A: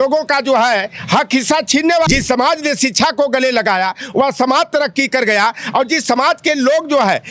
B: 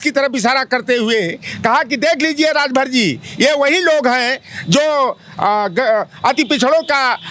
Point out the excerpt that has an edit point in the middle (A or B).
A